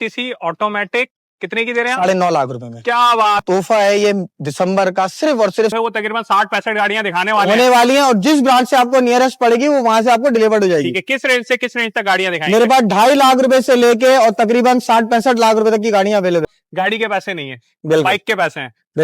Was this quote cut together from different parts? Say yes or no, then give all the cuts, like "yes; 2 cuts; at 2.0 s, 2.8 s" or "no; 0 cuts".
yes; 3 cuts; at 3.4 s, 5.7 s, 16.5 s